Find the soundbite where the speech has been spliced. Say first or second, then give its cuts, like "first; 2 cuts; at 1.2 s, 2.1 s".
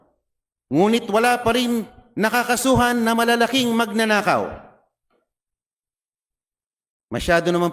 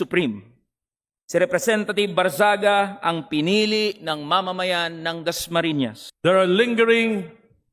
second; 1 cut; at 6.0 s